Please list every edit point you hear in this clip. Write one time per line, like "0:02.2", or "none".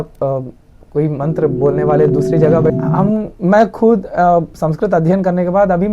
0:02.7

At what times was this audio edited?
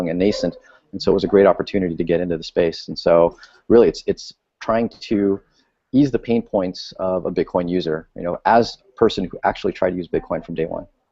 0:05.9

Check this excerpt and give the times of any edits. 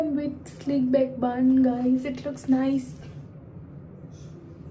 none

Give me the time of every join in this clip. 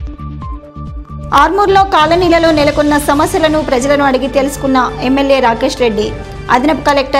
0:01.0

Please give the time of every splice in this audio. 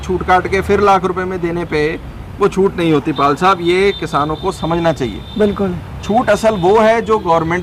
none

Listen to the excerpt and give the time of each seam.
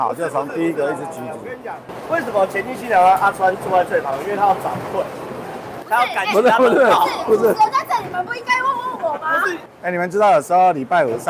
0:09.7

